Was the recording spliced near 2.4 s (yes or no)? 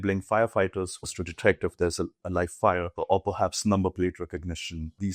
no